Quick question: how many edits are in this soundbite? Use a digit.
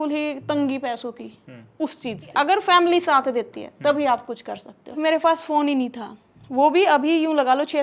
2